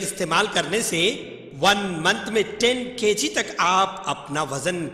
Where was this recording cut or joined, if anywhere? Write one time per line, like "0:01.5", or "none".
none